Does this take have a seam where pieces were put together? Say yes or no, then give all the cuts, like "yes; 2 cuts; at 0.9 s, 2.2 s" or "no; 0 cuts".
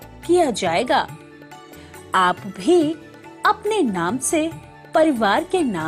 no; 0 cuts